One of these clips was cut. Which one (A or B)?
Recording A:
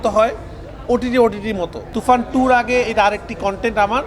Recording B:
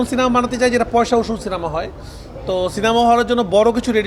A